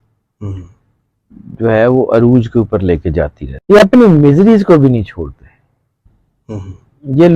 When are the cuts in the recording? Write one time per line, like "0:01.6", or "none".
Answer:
0:03.5